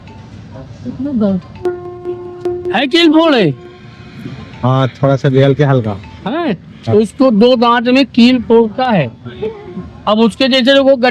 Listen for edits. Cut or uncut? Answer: uncut